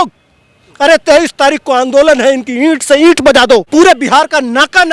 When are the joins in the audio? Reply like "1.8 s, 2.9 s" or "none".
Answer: 3.7 s